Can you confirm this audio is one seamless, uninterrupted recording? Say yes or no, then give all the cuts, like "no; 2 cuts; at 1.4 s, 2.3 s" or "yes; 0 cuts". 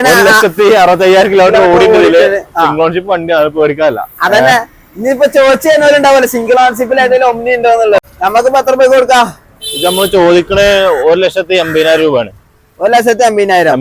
no; 1 cut; at 8.0 s